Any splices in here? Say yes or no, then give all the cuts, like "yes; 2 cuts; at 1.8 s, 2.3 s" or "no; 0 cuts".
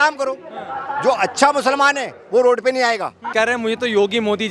no; 0 cuts